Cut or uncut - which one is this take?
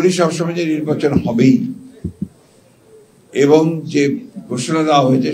uncut